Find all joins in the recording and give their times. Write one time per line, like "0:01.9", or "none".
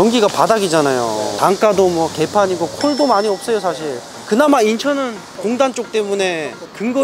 0:01.3